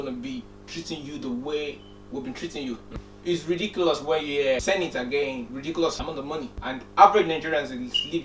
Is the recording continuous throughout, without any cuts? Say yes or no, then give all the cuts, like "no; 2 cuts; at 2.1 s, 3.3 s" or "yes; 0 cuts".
no; 3 cuts; at 3.0 s, 4.6 s, 6.1 s